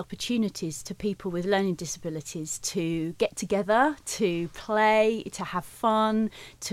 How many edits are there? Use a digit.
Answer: 0